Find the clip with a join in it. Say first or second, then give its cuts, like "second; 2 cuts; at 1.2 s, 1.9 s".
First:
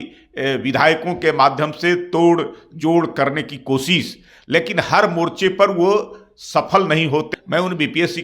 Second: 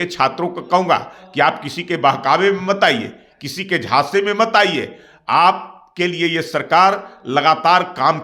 first; 1 cut; at 7.3 s